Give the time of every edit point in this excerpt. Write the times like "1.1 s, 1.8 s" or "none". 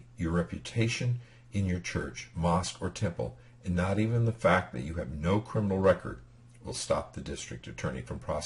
2.7 s